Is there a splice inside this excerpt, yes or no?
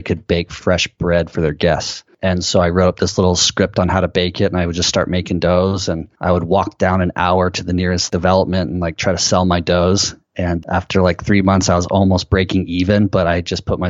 yes